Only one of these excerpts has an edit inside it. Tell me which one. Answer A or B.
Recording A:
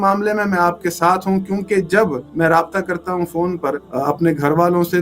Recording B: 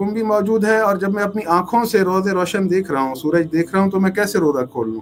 A